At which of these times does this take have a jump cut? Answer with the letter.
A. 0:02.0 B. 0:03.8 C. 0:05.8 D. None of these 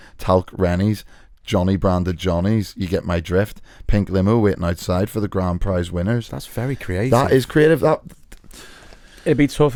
D